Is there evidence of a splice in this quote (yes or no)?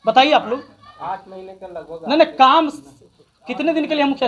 no